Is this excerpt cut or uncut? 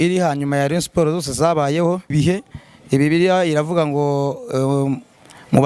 cut